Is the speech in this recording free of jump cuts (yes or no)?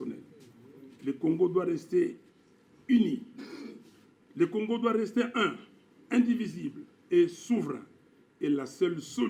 yes